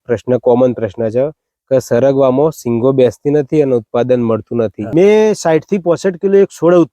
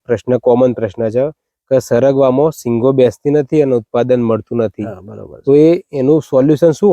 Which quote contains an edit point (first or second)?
first